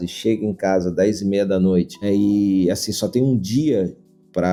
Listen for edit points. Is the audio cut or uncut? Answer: uncut